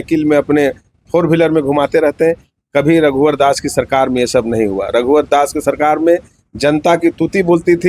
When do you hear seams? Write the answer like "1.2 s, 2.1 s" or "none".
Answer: none